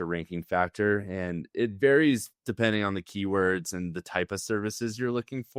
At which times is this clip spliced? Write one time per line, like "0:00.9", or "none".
none

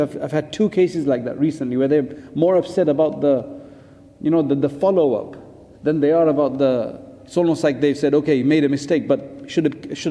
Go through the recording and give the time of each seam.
none

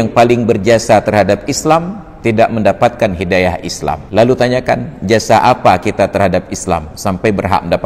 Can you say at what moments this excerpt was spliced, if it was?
0:04.0

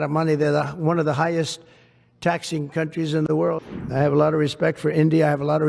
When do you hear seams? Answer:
0:03.6

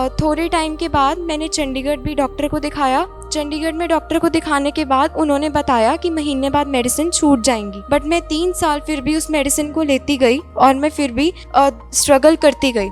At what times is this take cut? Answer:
0:03.2
0:07.7
0:11.6

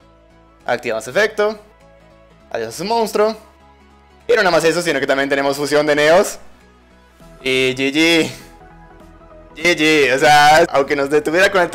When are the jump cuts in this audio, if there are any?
0:10.7

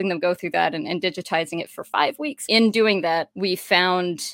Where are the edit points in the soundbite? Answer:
0:02.4
0:03.3

